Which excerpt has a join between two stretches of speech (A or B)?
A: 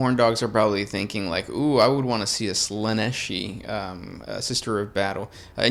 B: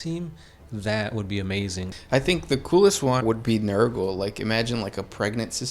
B